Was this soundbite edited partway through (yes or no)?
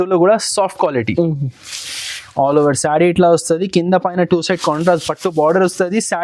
no